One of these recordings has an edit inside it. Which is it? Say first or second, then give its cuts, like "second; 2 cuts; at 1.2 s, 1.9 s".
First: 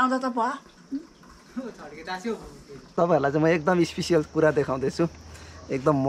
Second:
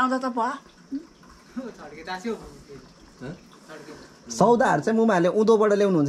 first; 1 cut; at 2.9 s